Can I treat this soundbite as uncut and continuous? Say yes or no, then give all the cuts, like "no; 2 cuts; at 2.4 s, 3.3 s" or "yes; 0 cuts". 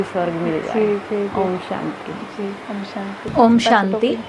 yes; 0 cuts